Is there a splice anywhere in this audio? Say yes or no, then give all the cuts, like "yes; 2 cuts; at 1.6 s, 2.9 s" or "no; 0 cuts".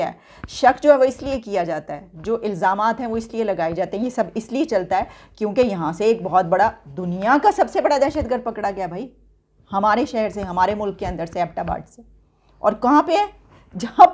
no; 0 cuts